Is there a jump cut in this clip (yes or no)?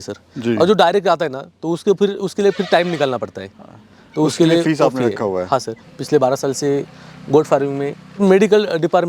yes